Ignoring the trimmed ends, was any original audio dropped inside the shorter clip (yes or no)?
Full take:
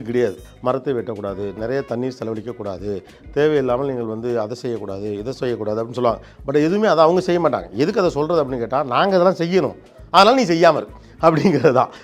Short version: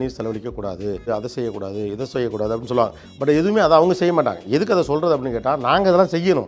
yes